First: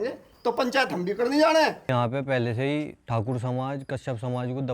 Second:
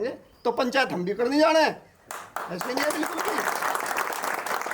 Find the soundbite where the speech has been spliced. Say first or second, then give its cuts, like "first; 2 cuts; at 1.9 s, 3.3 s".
first; 1 cut; at 1.9 s